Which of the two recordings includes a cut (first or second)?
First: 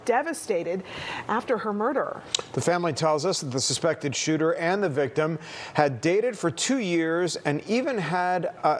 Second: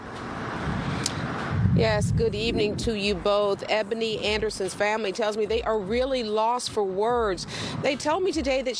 first